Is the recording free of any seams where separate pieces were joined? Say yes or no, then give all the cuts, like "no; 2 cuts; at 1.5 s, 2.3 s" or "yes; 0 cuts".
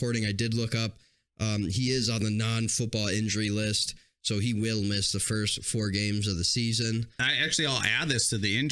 no; 1 cut; at 7.2 s